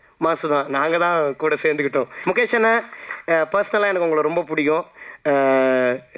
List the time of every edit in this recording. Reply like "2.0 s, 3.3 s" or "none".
2.1 s

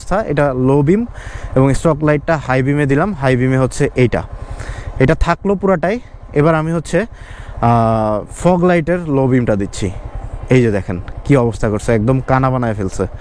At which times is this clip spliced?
none

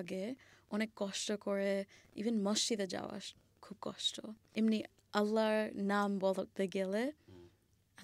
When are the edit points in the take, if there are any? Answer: 4.4 s

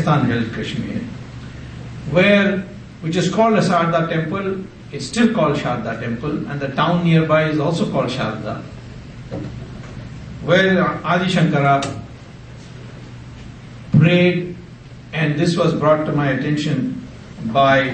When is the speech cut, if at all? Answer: 12.1 s

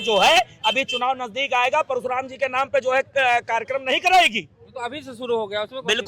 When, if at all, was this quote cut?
none

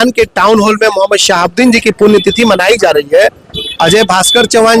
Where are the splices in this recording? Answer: none

